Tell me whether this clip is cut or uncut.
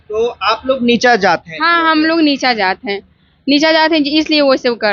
uncut